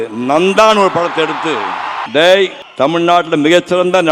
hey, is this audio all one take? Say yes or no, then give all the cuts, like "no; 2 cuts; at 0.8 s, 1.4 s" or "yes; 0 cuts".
no; 2 cuts; at 2.0 s, 2.6 s